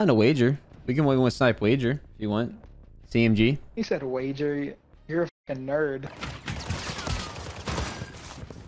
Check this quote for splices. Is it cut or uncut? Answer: cut